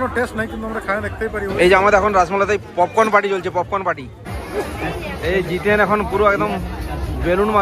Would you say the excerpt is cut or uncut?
cut